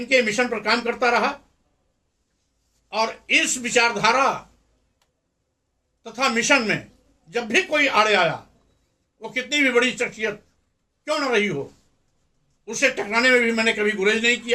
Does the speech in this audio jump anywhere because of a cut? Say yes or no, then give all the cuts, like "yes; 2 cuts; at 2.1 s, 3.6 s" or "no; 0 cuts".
no; 0 cuts